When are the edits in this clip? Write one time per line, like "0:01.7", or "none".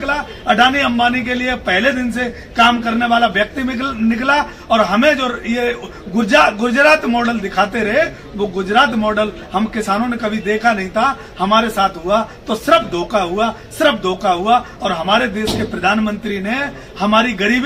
none